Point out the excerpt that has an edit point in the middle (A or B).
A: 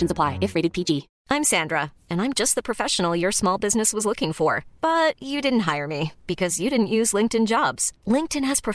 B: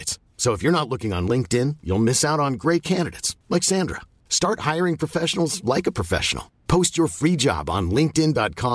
A